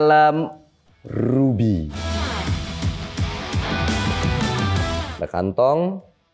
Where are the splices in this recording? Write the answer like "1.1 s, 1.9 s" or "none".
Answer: 2.0 s, 5.1 s